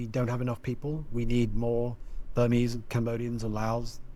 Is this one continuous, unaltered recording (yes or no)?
yes